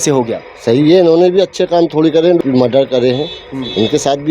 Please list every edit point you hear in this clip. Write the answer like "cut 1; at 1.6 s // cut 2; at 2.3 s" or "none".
cut 1; at 2.4 s